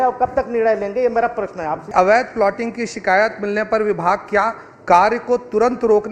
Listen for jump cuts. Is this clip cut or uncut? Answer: cut